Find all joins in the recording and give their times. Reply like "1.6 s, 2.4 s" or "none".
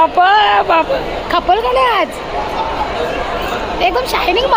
1.2 s